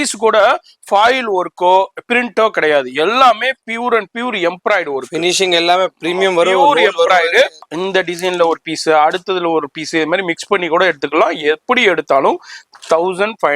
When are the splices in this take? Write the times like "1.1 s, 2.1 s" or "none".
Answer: 7.7 s